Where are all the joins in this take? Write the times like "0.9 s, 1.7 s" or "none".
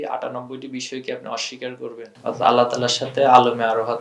2.1 s